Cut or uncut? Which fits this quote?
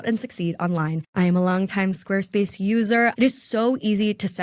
cut